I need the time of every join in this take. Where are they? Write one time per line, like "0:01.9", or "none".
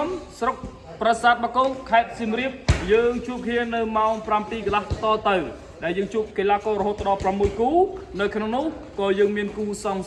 none